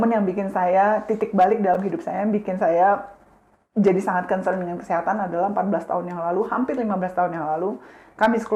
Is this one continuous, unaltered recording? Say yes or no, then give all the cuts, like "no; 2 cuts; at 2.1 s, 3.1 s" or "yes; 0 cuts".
yes; 0 cuts